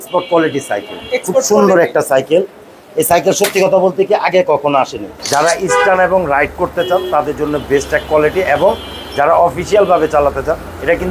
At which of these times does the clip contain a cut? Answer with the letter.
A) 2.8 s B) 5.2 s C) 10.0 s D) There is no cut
B